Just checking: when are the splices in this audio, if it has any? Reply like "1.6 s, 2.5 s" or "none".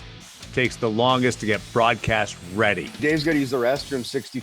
3.0 s